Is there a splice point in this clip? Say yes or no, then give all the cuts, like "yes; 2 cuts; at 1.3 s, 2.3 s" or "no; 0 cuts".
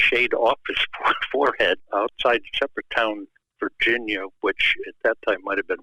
yes; 1 cut; at 1.8 s